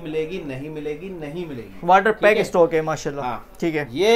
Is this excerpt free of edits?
yes; 0 cuts

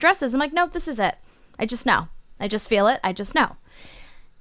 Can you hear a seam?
no; 0 cuts

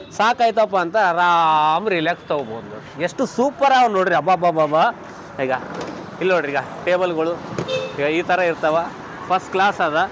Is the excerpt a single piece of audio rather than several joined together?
yes; 0 cuts

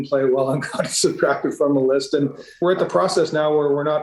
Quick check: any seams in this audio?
yes; 1 cut; at 2.5 s

